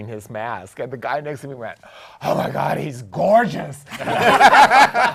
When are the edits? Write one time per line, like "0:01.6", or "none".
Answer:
none